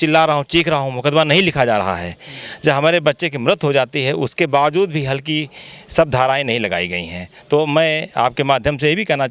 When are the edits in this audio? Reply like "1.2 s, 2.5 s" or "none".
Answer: none